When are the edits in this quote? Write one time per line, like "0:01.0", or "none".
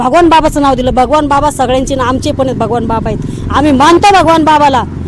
none